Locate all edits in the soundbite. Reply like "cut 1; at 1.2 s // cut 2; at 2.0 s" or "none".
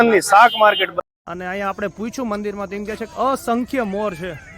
cut 1; at 0.9 s